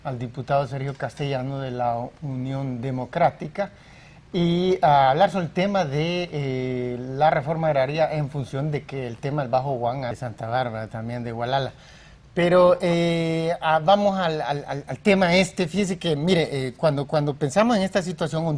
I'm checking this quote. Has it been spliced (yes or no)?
no